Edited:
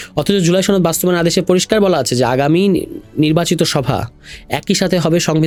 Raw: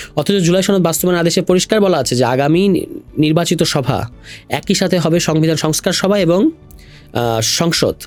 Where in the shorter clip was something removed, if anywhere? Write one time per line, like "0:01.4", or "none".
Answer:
none